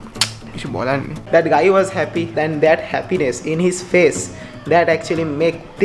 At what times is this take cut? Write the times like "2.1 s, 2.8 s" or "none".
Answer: 1.2 s, 2.3 s